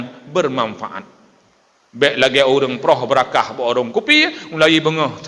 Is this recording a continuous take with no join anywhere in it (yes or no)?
yes